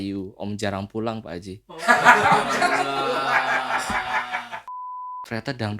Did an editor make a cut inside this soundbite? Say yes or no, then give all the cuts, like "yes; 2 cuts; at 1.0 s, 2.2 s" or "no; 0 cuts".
yes; 1 cut; at 4.6 s